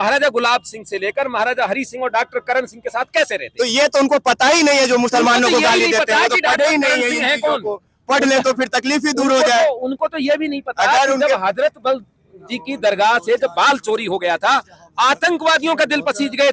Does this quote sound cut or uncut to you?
uncut